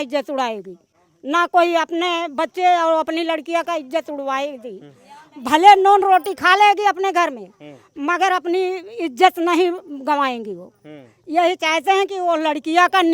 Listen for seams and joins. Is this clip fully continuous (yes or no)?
yes